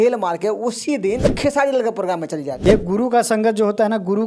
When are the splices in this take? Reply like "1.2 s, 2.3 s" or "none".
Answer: 1.3 s, 2.5 s